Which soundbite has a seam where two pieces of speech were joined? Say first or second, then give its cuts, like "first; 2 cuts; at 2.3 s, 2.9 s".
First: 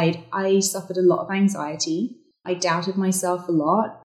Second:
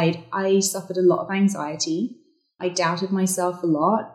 first; 1 cut; at 2.3 s